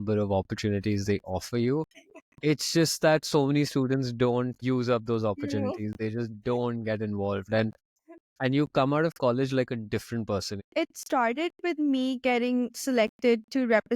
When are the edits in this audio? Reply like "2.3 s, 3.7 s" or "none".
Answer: 4.6 s, 10.6 s, 12.8 s